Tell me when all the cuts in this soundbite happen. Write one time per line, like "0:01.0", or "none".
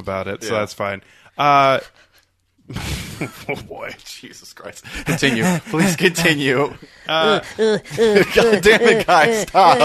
none